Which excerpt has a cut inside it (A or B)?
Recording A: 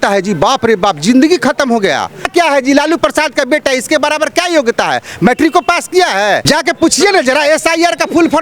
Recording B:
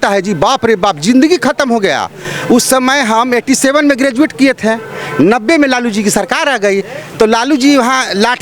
A